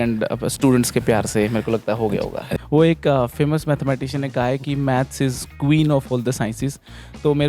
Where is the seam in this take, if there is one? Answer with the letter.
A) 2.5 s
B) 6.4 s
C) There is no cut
A